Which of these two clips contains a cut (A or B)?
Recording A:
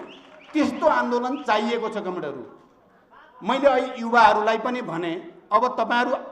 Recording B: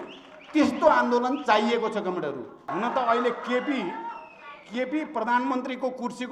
B